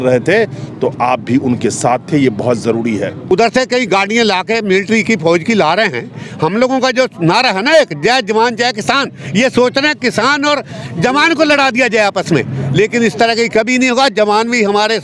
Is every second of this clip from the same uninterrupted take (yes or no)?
no